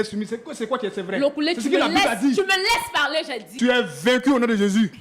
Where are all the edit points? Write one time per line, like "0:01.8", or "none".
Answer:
0:03.4